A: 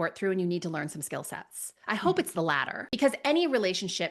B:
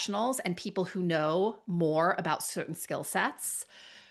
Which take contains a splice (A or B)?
A